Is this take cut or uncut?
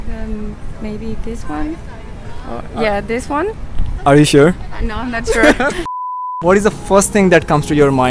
cut